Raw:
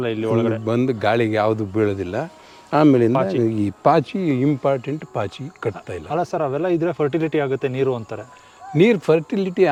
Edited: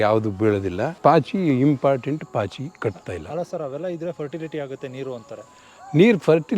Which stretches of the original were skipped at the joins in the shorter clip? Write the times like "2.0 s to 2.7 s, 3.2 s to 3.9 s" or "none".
2.3 s to 3.7 s